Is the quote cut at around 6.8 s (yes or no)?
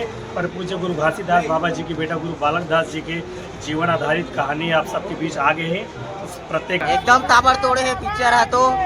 yes